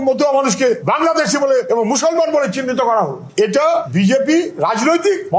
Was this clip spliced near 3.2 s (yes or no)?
yes